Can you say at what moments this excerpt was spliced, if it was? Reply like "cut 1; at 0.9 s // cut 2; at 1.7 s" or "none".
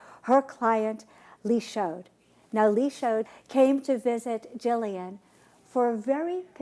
none